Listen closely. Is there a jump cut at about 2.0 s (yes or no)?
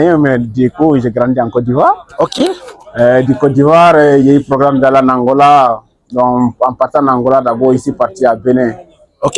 no